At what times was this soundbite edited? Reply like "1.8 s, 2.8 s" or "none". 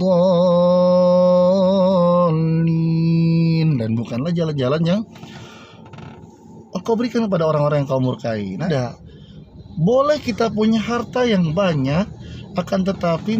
8.6 s